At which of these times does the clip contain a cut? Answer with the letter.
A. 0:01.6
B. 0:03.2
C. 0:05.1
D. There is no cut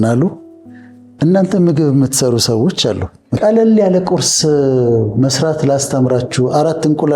B